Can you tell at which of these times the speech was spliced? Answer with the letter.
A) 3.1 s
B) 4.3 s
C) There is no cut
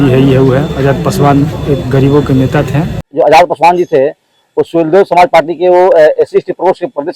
A